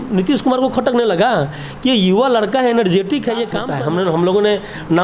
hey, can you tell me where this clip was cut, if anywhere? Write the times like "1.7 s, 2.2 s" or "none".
3.6 s